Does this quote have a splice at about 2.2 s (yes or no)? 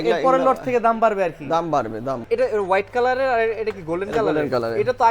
yes